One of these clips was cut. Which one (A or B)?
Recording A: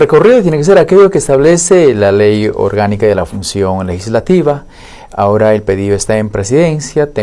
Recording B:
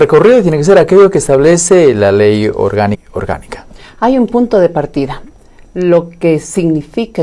A